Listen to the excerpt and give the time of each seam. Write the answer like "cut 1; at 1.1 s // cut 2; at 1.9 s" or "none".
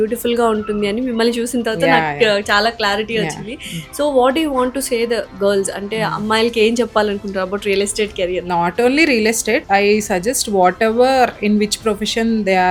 none